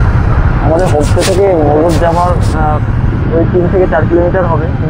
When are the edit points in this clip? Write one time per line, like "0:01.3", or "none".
none